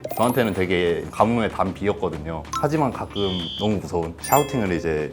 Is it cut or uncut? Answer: cut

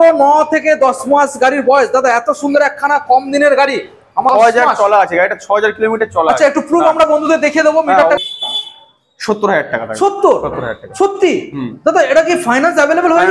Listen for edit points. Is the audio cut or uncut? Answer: cut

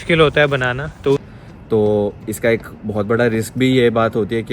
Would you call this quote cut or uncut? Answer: cut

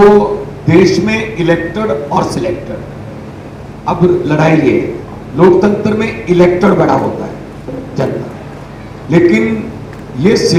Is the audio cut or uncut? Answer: uncut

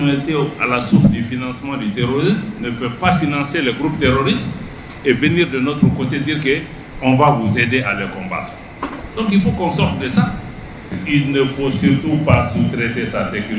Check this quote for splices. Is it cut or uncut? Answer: cut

